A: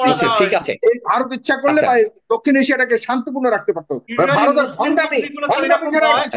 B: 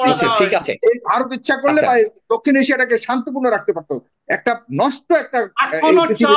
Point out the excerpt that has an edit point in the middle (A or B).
A